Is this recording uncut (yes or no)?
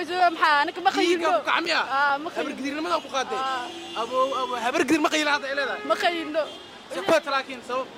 yes